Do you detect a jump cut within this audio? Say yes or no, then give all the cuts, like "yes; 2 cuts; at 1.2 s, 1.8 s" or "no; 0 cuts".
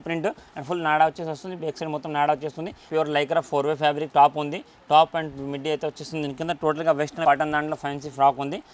yes; 2 cuts; at 2.8 s, 7.2 s